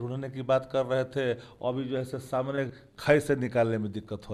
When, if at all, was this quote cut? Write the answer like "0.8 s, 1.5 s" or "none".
none